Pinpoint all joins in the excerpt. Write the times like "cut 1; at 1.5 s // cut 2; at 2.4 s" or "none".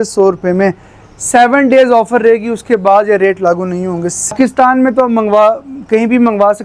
cut 1; at 4.3 s